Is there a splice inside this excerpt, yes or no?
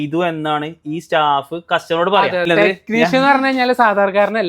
yes